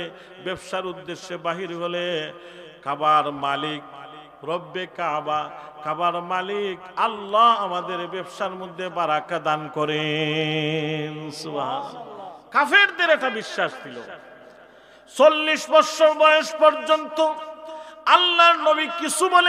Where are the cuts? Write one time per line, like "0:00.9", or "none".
none